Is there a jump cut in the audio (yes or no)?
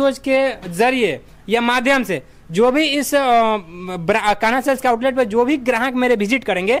no